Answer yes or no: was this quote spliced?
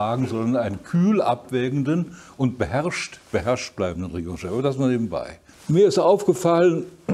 no